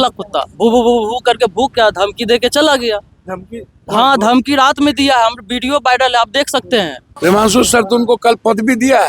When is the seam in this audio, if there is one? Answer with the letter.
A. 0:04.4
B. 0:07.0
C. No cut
B